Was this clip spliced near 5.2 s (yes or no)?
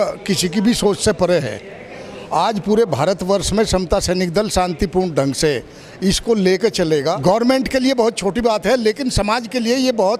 no